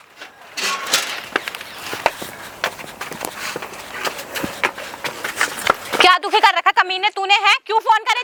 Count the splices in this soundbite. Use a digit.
0